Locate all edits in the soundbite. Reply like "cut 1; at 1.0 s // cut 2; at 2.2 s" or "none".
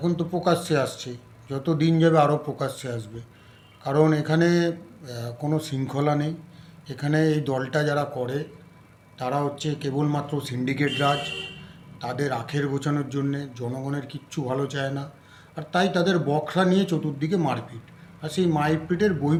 none